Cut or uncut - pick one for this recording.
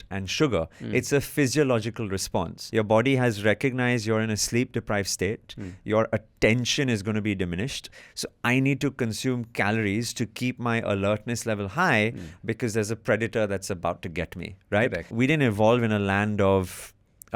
cut